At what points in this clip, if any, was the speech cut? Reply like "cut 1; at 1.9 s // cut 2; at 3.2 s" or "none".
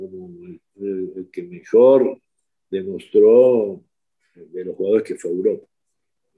none